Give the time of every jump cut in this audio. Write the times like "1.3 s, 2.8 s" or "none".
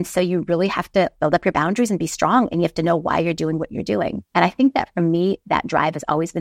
1.1 s, 4.2 s